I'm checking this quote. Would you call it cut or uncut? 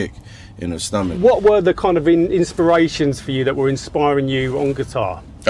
cut